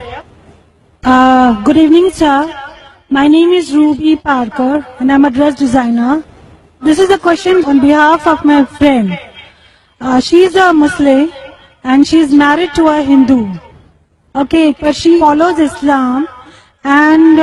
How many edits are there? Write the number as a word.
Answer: zero